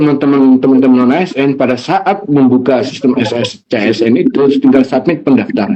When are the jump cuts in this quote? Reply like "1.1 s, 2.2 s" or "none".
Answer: none